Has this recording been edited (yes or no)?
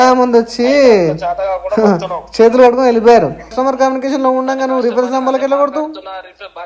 yes